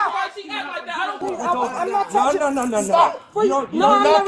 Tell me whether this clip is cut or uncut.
cut